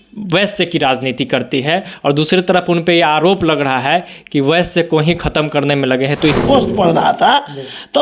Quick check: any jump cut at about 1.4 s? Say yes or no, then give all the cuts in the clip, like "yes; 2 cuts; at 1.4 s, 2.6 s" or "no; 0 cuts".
no; 1 cut; at 6.4 s